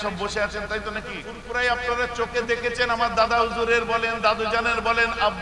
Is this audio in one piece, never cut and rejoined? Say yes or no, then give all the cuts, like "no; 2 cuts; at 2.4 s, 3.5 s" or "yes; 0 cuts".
no; 1 cut; at 1.3 s